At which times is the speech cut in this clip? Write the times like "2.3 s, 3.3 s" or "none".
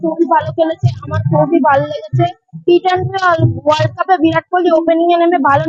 none